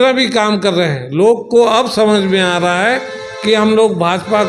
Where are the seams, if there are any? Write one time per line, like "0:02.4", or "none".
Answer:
none